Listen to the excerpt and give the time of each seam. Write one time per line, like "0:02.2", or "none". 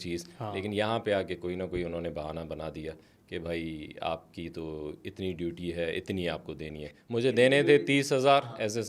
none